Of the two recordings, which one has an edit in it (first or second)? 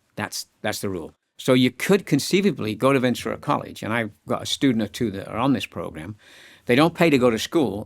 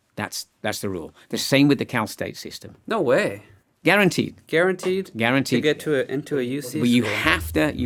first